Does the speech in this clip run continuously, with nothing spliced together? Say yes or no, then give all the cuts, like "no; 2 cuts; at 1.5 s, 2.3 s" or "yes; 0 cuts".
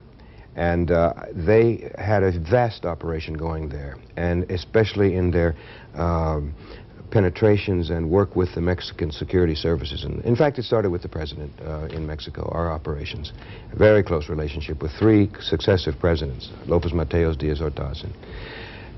yes; 0 cuts